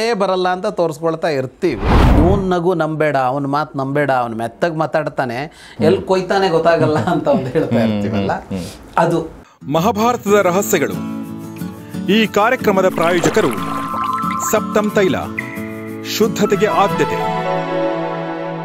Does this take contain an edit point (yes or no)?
yes